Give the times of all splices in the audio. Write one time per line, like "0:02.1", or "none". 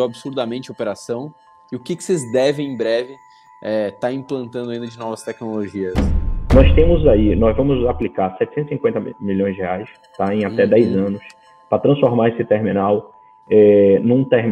0:06.1